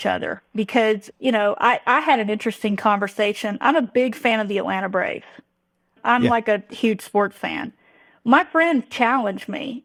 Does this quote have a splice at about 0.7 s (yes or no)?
no